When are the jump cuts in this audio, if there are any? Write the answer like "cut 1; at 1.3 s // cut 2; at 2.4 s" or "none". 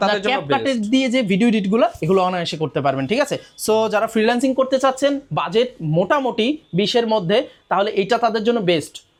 none